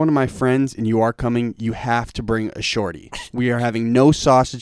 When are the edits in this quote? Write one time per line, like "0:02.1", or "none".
none